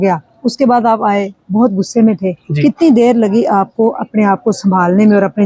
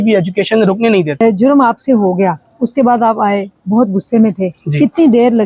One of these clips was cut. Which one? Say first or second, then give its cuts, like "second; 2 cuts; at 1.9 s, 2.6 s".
second; 1 cut; at 1.2 s